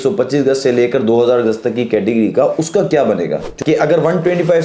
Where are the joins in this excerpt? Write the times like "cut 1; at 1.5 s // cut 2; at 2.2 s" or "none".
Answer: cut 1; at 3.4 s